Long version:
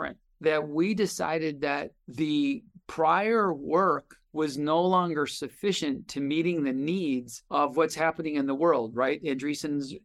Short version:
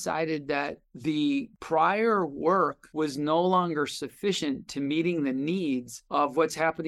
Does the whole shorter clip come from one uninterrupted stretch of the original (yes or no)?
no